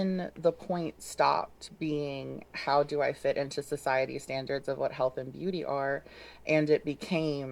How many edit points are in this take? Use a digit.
1